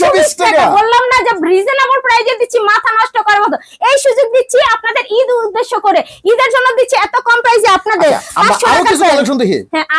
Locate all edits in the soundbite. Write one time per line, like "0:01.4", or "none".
none